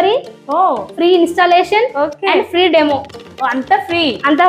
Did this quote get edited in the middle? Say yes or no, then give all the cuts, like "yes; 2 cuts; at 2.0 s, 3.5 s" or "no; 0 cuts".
no; 0 cuts